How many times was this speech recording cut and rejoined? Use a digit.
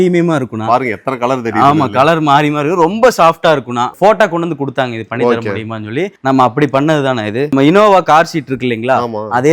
2